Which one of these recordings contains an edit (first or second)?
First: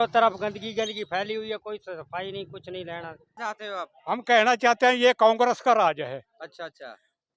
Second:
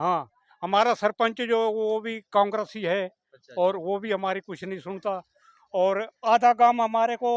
first